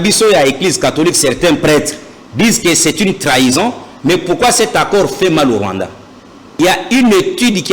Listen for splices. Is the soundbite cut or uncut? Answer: cut